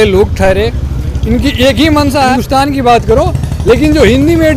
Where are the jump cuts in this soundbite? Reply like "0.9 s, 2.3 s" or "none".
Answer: 2.3 s

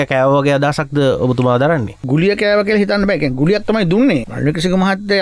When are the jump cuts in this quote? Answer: 2.0 s, 4.3 s

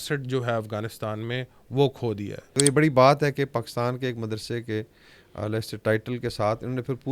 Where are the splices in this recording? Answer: 2.5 s

